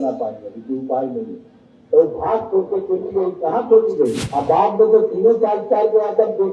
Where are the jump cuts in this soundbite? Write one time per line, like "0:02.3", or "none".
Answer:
0:04.2